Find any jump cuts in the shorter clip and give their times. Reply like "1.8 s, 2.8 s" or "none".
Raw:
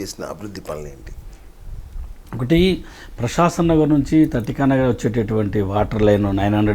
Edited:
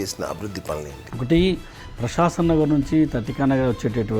1.0 s